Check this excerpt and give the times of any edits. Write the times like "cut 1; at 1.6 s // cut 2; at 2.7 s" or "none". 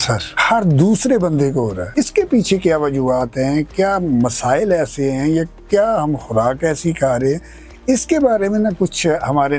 none